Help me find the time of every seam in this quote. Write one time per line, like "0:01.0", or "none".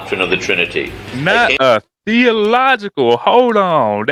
none